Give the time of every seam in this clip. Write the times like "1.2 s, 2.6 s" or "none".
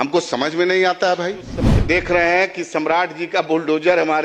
1.7 s